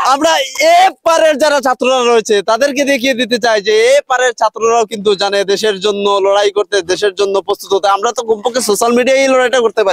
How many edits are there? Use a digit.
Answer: 0